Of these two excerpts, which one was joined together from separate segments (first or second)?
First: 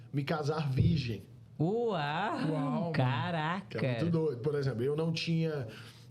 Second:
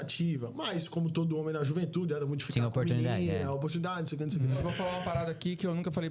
second